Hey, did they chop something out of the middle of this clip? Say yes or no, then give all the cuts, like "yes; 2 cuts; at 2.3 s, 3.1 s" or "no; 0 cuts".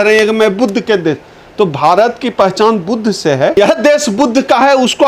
yes; 1 cut; at 3.6 s